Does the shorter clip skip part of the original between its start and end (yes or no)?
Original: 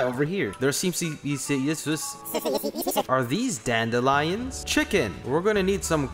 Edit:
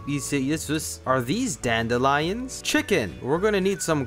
yes